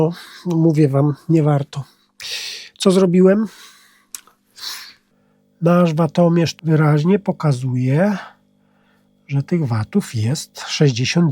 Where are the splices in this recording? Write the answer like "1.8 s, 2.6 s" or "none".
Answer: 5.0 s, 6.5 s